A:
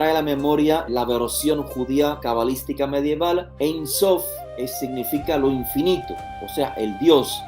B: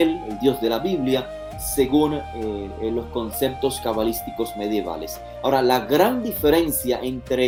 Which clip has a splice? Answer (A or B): A